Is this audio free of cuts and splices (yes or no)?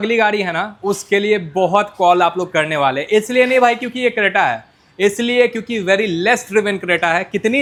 yes